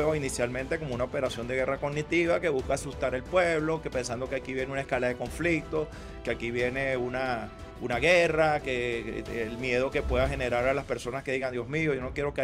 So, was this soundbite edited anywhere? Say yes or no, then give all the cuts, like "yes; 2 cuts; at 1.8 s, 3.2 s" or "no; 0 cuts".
no; 0 cuts